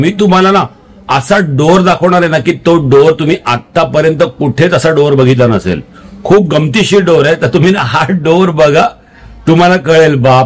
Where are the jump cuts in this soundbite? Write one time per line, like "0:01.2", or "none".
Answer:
none